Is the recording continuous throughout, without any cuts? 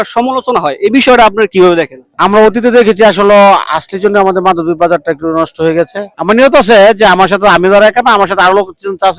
no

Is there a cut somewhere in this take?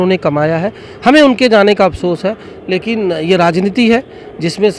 no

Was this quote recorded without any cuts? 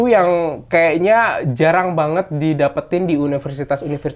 yes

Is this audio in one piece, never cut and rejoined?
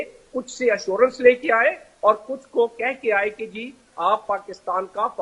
yes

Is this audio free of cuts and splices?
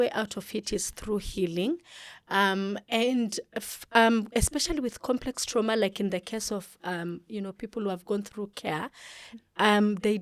yes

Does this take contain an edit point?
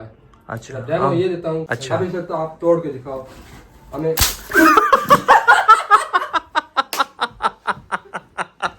yes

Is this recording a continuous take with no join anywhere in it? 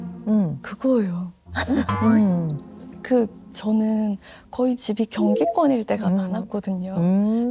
yes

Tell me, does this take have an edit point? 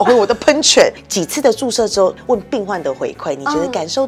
yes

